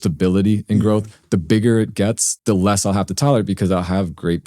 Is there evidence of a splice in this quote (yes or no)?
yes